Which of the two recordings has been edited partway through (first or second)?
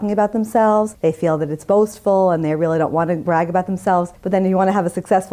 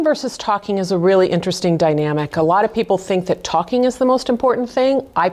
first